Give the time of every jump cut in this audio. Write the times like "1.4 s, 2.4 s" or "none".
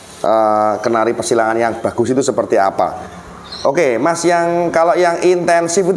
none